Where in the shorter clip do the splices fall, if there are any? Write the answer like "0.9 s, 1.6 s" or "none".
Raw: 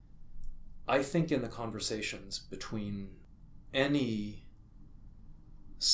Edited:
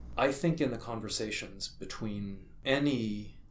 2.5 s